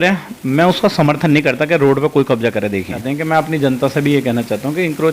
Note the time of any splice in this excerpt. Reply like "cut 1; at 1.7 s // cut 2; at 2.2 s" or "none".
cut 1; at 3.0 s